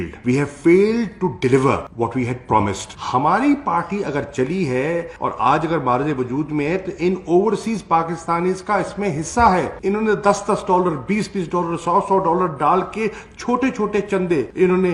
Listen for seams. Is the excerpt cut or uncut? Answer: uncut